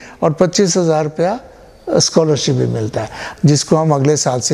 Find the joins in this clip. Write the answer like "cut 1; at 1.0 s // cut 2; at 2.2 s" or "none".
cut 1; at 3.2 s